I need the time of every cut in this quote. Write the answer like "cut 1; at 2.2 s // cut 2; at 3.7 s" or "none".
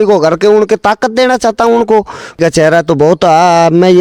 cut 1; at 2.4 s